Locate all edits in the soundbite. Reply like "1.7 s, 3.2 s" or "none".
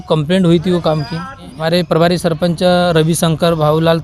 1.5 s